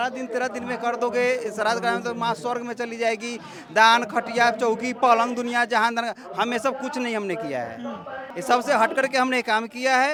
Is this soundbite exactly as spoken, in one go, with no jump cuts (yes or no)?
yes